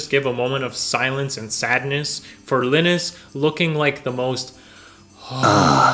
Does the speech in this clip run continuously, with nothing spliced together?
yes; 0 cuts

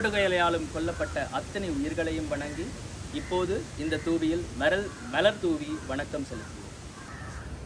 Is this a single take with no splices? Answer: yes; 0 cuts

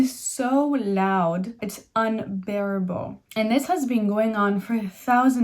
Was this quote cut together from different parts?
yes; 2 cuts; at 1.6 s, 3.1 s

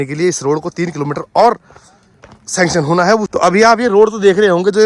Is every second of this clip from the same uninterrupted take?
no; 1 cut; at 3.3 s

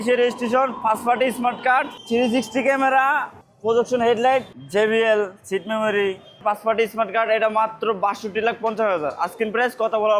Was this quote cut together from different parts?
yes; 3 cuts; at 3.4 s, 4.5 s, 6.4 s

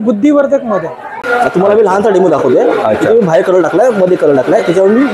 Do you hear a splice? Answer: yes; 1 cut; at 1.2 s

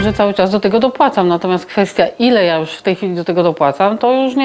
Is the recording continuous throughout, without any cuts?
yes; 0 cuts

